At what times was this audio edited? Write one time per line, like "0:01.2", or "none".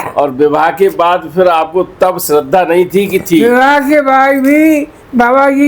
none